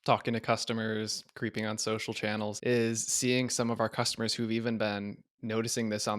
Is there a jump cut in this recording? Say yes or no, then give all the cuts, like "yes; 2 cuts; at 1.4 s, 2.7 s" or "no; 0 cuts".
yes; 1 cut; at 2.6 s